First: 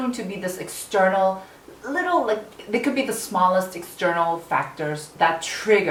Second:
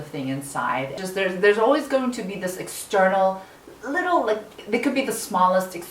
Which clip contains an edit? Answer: second; 1 cut; at 1.0 s

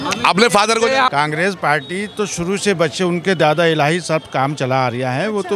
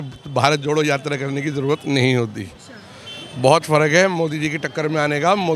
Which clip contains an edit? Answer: first; 1 cut; at 1.1 s

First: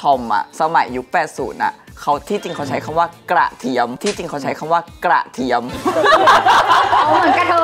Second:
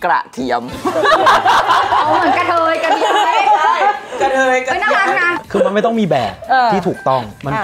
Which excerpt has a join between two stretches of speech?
second; 1 cut; at 5.4 s

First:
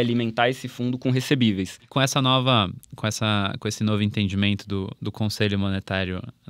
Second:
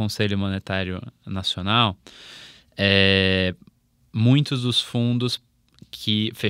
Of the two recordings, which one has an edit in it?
first; 1 cut; at 1.8 s

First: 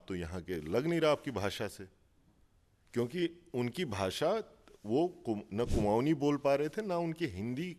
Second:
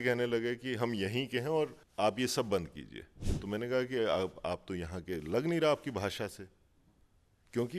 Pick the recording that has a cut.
second; 1 cut; at 1.8 s

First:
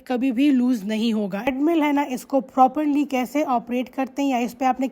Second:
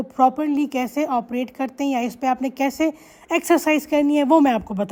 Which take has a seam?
first; 1 cut; at 1.5 s

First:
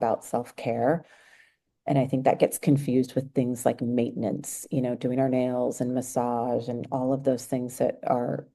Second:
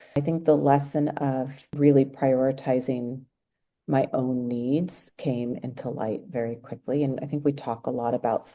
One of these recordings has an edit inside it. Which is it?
second; 1 cut; at 1.6 s

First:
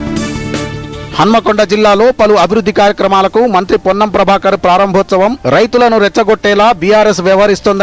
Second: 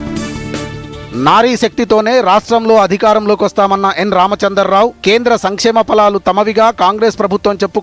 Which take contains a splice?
first; 1 cut; at 0.9 s

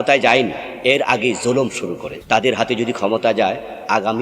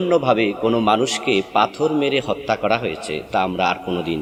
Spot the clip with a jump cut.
first; 1 cut; at 2.1 s

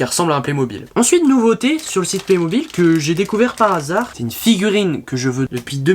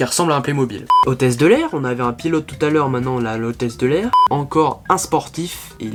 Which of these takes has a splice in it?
first; 2 cuts; at 0.9 s, 4.1 s

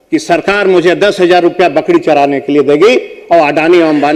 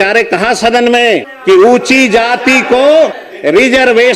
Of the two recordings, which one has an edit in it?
second; 2 cuts; at 1.3 s, 3.3 s

